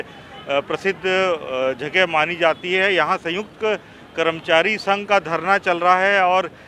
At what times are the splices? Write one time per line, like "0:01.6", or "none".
none